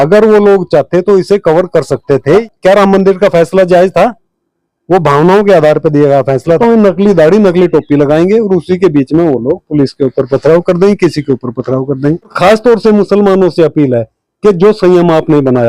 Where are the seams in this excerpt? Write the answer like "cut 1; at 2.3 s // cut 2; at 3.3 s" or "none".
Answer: cut 1; at 2.4 s // cut 2; at 6.6 s // cut 3; at 12.3 s